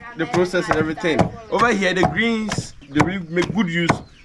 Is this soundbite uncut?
no; 1 cut; at 2.8 s

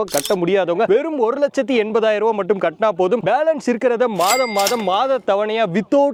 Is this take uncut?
yes; 0 cuts

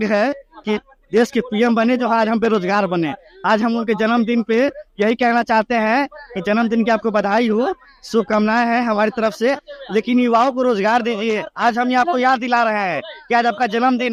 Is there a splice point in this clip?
no; 0 cuts

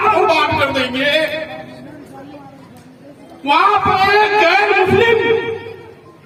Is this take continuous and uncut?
yes; 0 cuts

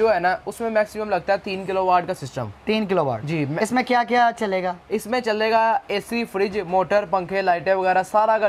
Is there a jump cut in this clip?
no; 0 cuts

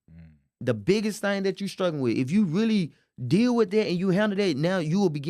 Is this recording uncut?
yes; 0 cuts

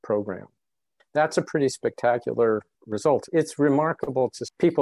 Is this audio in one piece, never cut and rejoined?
no; 2 cuts; at 1.0 s, 3.2 s

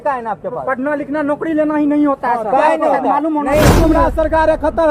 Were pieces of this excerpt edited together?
yes; 1 cut; at 3.8 s

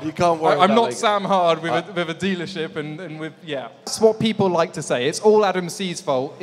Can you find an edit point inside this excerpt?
yes; 1 cut; at 3.9 s

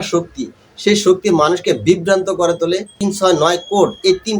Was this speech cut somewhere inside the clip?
yes; 1 cut; at 2.9 s

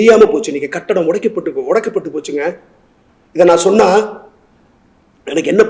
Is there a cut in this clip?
no; 0 cuts

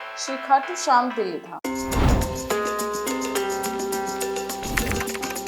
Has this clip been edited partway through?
yes; 1 cut; at 1.5 s

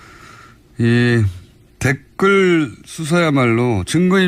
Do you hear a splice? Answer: yes; 1 cut; at 1.6 s

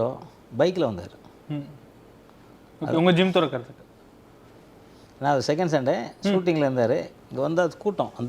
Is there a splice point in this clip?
no; 0 cuts

